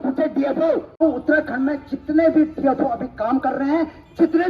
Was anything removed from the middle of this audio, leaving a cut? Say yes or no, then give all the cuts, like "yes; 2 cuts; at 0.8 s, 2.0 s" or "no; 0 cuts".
yes; 1 cut; at 1.0 s